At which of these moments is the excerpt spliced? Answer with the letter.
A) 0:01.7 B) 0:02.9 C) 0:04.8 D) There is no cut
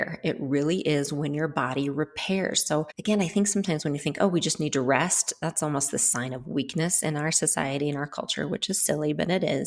B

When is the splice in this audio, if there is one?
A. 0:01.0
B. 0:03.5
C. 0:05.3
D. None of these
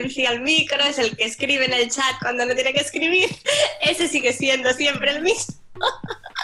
D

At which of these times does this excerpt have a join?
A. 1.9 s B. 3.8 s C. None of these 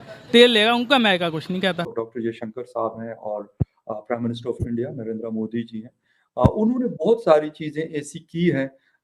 A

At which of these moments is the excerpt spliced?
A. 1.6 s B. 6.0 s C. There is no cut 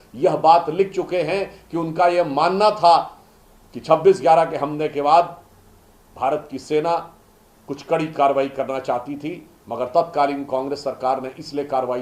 C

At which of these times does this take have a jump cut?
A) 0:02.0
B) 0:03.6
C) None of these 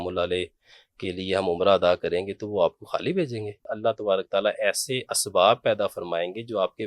B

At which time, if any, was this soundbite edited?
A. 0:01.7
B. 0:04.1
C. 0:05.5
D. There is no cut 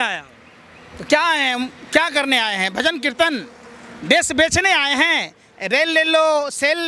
D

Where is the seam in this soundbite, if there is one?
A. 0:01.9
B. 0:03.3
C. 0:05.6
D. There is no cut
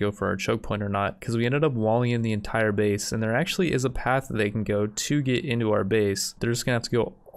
D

